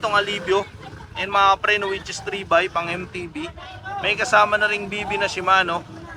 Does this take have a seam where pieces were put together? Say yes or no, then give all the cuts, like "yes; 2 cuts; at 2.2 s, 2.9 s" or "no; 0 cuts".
no; 0 cuts